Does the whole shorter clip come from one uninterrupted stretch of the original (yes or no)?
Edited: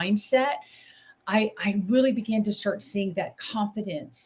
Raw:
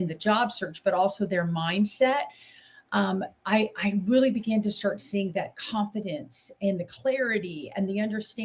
no